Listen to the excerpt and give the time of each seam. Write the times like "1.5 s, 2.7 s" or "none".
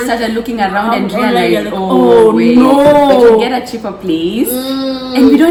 none